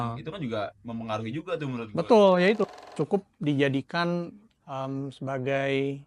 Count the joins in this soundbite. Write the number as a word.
one